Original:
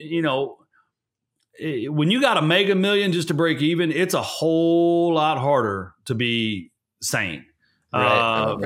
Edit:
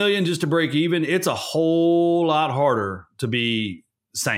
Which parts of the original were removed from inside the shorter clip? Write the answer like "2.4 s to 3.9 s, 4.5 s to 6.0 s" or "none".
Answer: none